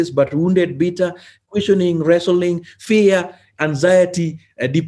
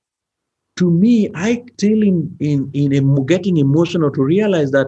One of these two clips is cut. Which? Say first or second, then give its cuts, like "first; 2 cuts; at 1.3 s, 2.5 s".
second; 1 cut; at 1.7 s